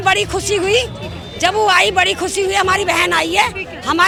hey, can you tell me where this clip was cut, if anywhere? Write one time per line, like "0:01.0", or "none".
none